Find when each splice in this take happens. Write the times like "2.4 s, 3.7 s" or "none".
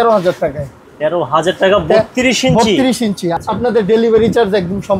3.3 s